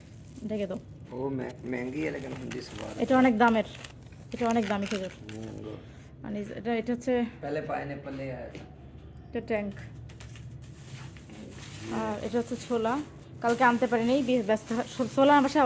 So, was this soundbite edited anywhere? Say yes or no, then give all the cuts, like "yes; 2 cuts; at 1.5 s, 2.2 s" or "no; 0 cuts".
no; 0 cuts